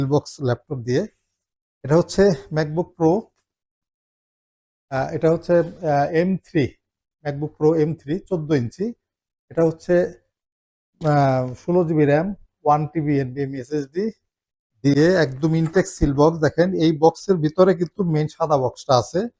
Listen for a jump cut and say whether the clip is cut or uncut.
uncut